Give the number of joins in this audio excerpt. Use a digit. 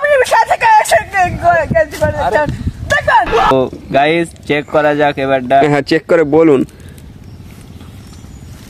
1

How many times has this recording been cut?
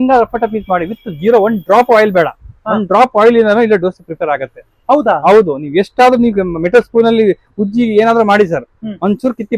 0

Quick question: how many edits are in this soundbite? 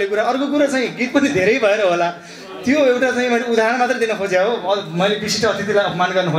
0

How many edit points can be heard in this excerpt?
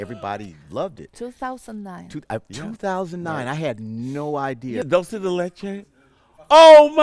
1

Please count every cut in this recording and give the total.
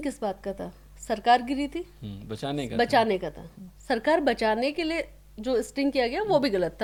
0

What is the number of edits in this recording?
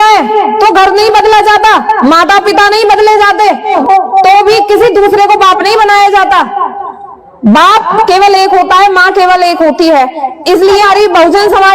2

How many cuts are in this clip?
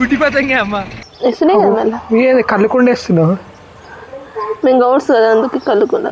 1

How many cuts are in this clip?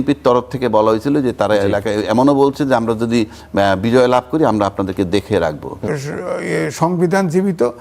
1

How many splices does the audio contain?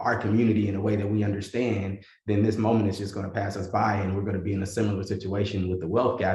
0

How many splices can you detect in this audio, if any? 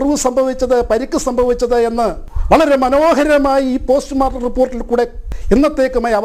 2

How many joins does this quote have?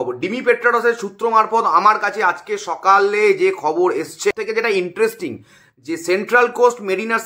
1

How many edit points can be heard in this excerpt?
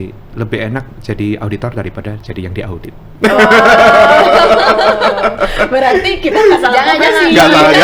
0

